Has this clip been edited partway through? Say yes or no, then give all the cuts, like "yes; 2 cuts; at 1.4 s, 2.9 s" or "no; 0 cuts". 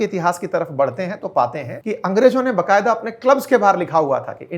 yes; 1 cut; at 1.7 s